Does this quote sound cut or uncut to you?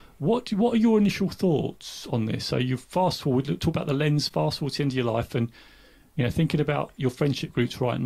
uncut